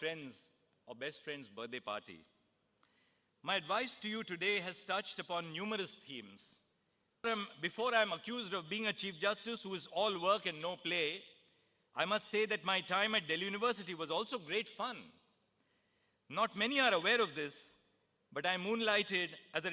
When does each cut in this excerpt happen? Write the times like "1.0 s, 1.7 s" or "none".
7.2 s